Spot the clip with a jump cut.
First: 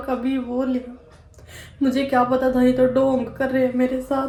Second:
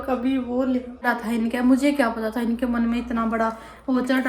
second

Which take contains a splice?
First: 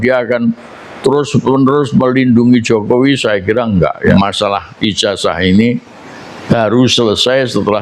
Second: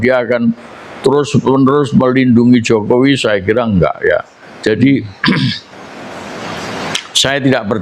first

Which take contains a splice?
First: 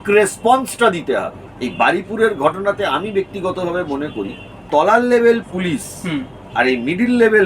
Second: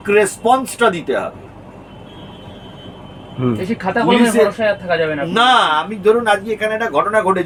first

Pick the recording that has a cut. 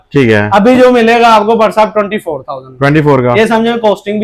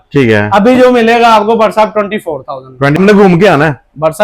second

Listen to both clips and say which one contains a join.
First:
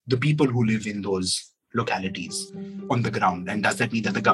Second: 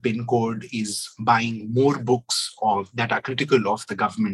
first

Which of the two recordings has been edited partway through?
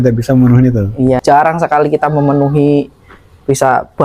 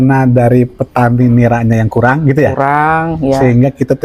first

